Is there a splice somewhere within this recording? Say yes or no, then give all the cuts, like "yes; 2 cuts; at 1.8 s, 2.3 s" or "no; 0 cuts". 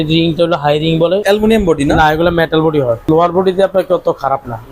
yes; 2 cuts; at 1.2 s, 3.0 s